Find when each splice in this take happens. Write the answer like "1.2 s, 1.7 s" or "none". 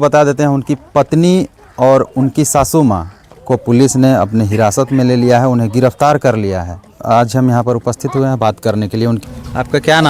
none